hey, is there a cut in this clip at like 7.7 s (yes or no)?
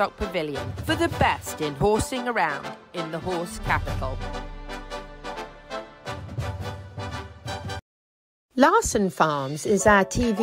yes